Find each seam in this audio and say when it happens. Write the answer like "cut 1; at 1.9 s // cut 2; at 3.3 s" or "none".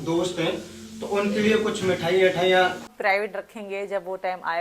cut 1; at 2.9 s